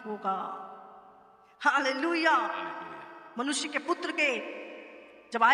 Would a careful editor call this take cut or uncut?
uncut